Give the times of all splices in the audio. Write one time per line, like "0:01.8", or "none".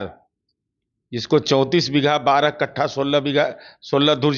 none